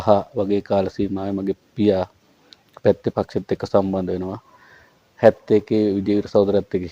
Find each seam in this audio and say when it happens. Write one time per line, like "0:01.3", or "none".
none